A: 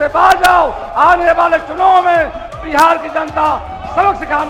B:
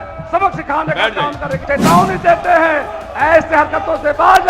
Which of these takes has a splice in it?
B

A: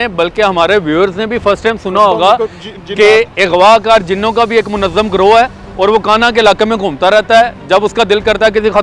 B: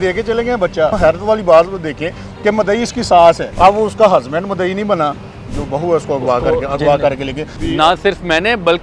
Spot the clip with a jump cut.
B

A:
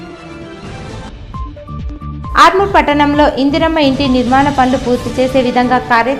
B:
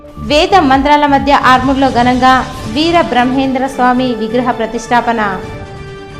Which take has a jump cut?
A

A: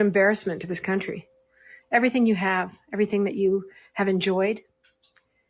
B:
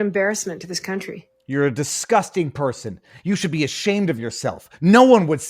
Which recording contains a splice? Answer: A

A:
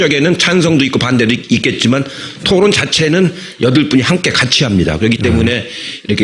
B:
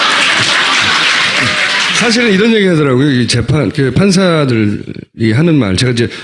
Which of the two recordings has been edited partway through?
B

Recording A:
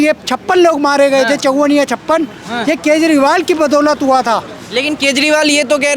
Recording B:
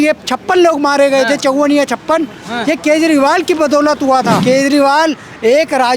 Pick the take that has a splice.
B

